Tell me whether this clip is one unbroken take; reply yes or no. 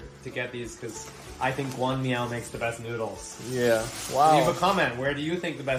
yes